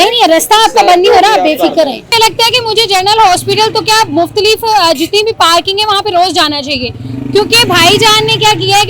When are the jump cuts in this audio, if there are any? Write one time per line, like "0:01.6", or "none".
none